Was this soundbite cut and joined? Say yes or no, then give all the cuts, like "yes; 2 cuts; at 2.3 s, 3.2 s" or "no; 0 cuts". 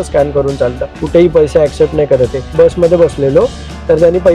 yes; 2 cuts; at 0.9 s, 2.5 s